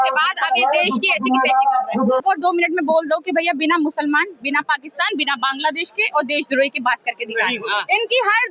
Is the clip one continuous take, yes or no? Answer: no